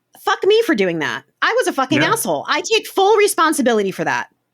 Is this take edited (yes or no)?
yes